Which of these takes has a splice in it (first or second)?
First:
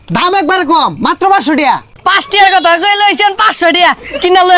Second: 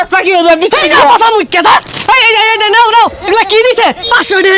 first